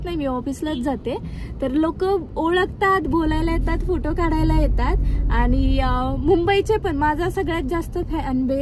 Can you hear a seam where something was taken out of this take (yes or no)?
no